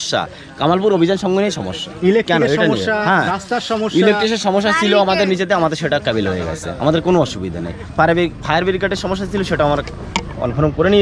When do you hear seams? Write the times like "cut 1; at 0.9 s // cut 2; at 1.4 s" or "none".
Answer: none